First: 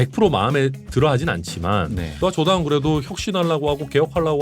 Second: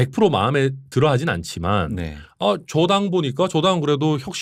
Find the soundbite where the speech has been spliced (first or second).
first